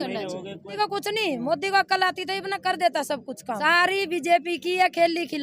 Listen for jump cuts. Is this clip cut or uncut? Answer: cut